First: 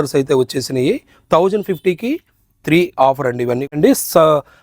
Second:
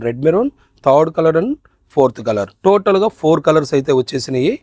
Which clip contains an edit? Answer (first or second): first